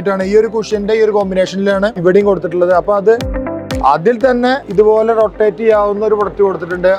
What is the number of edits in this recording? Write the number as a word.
one